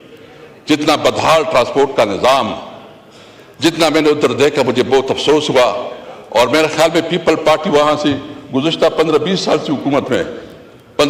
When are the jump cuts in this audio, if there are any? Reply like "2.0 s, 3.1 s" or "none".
none